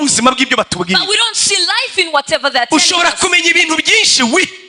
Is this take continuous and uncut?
yes; 0 cuts

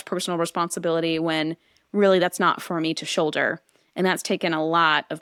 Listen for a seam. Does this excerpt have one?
no; 0 cuts

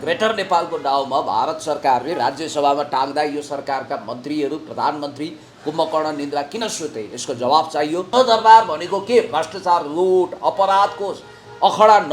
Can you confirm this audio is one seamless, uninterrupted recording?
no; 1 cut; at 8.1 s

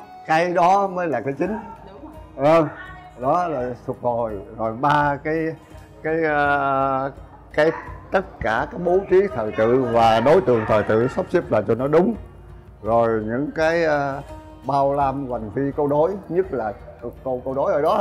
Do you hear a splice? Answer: no; 0 cuts

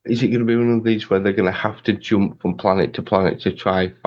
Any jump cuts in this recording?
no; 0 cuts

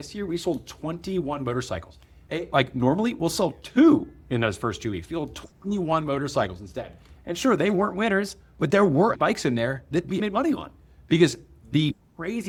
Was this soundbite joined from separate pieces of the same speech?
no; 0 cuts

